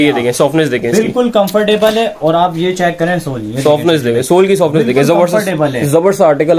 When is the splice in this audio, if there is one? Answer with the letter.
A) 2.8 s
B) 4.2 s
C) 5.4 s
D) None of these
D